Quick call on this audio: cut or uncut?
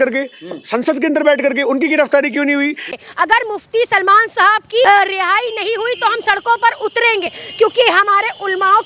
cut